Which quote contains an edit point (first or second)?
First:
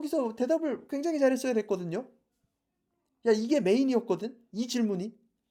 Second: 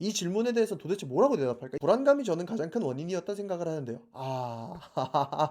second